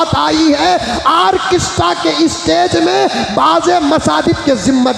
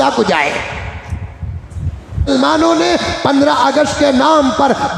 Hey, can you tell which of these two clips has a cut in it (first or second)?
second